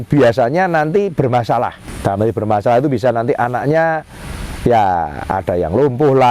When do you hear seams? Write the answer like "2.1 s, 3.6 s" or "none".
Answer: 1.8 s

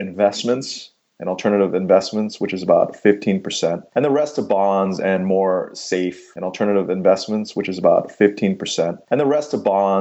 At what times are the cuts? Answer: 6.3 s

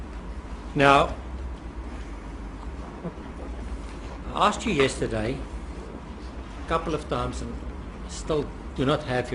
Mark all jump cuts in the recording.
2.1 s

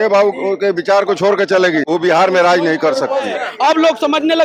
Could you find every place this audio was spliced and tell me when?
1.8 s, 3.4 s

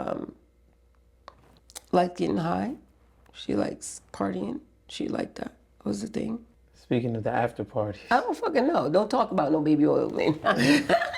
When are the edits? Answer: 6.6 s

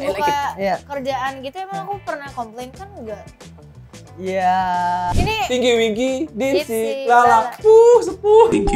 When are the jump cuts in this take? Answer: 5.2 s

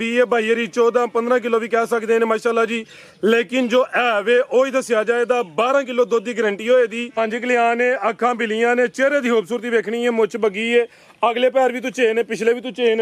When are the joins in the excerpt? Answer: 7.2 s

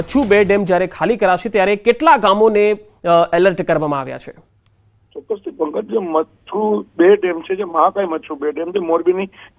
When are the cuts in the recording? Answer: 3.8 s

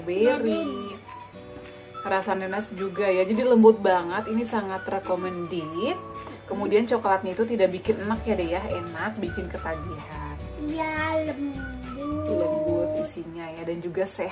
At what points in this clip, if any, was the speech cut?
none

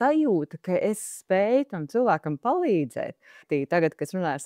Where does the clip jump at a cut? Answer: 3.4 s

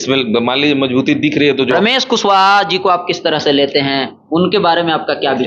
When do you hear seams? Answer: 1.7 s

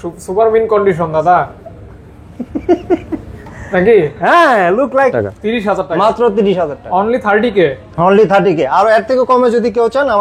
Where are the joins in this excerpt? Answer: 5.1 s

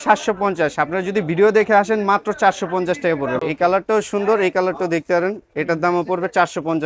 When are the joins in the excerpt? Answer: 3.4 s

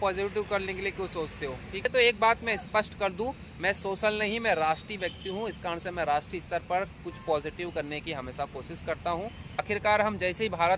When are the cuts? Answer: 1.8 s, 9.6 s

